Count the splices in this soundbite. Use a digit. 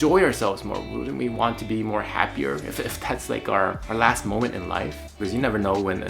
2